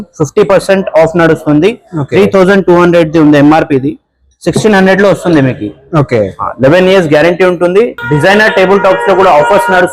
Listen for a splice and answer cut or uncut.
cut